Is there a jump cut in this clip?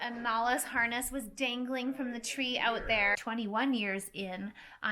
yes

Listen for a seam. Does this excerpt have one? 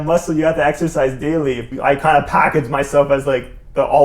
yes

